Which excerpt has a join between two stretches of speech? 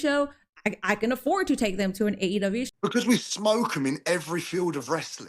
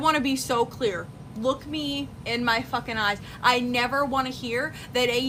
first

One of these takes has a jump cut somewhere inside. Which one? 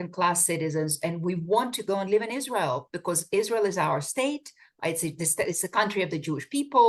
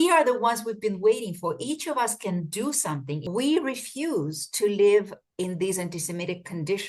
second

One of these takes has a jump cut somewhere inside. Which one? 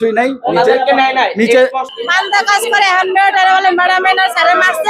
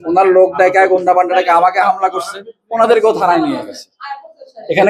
first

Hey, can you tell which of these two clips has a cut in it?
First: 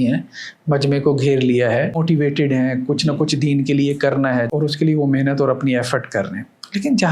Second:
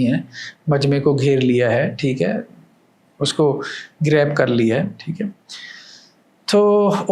first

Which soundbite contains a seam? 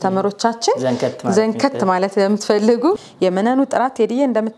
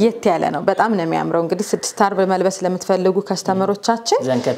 first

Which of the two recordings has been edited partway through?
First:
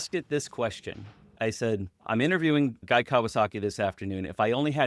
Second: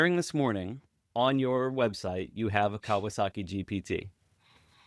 first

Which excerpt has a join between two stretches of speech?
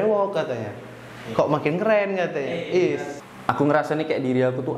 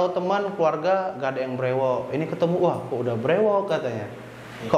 first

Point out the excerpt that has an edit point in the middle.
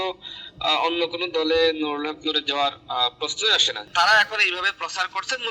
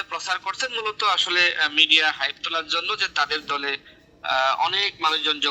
first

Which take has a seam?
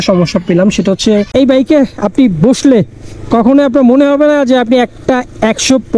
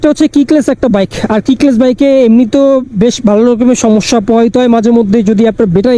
first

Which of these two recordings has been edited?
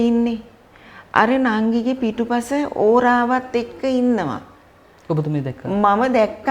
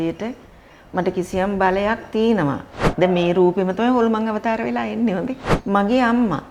second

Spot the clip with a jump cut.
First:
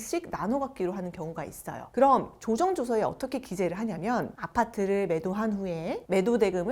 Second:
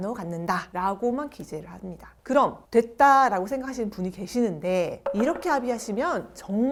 first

